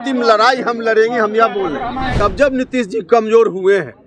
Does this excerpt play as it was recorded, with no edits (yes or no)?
no